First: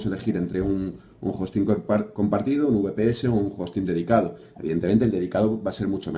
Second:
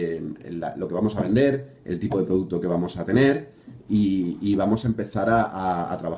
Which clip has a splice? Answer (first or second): second